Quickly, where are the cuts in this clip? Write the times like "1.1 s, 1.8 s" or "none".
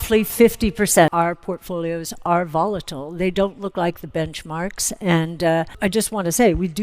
1.1 s, 5.7 s